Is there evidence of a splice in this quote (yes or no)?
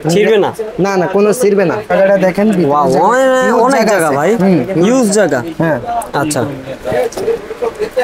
yes